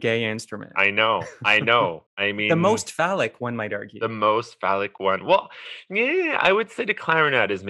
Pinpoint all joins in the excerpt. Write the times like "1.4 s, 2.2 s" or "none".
1.0 s, 2.5 s, 3.8 s